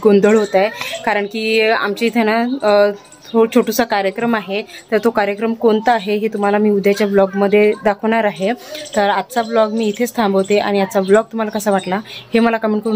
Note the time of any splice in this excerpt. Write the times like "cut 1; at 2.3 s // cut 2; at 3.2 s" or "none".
none